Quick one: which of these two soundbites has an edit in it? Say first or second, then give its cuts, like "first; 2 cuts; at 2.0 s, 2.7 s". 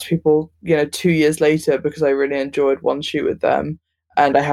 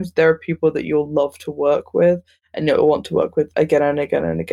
second; 1 cut; at 3.5 s